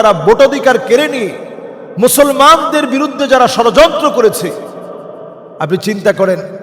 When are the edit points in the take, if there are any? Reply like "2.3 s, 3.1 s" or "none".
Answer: none